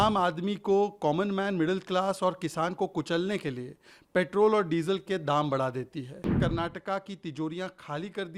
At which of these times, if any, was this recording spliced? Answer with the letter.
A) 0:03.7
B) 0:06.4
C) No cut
B